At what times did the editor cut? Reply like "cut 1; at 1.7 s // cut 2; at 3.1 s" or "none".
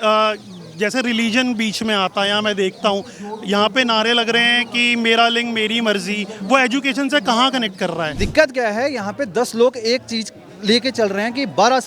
cut 1; at 8.1 s